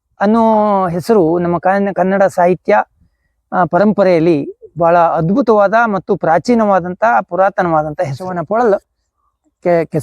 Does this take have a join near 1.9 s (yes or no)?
no